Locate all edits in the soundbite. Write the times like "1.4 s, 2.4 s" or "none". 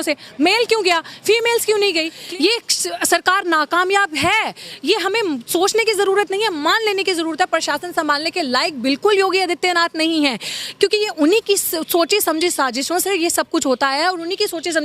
2.2 s